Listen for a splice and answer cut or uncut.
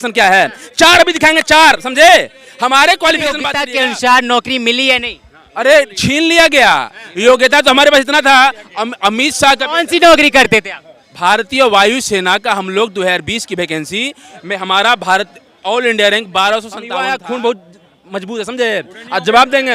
cut